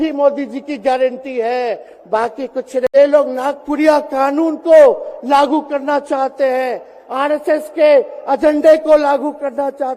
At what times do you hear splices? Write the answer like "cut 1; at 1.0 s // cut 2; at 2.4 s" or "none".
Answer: cut 1; at 2.9 s